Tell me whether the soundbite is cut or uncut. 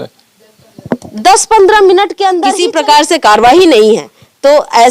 cut